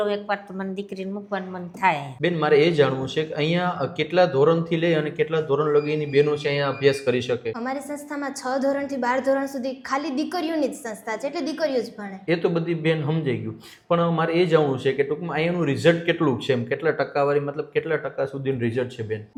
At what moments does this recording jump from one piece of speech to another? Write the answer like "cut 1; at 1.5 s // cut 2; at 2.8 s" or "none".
none